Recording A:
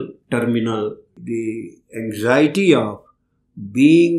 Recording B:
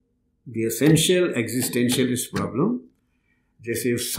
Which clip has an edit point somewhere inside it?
A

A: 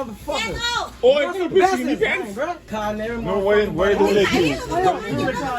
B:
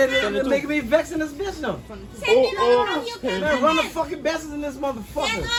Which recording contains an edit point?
A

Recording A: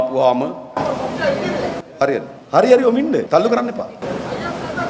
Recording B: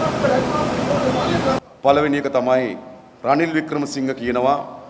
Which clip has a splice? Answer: A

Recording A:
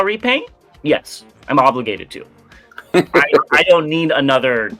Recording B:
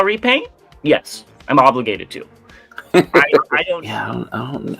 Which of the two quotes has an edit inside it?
B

